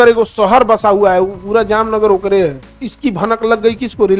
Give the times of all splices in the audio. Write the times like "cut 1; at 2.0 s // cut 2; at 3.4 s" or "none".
cut 1; at 2.6 s